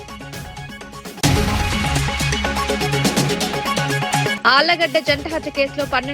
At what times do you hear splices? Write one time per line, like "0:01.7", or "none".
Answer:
0:01.2
0:04.4